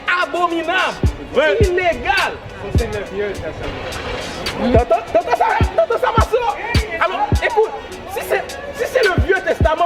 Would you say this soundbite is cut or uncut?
uncut